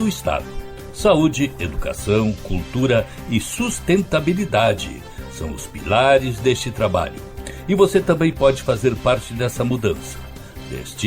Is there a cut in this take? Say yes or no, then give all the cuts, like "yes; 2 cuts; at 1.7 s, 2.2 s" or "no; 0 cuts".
no; 0 cuts